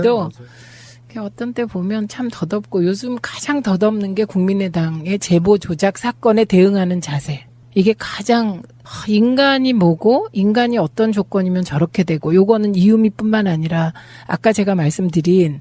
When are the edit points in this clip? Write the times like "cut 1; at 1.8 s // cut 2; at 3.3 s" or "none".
none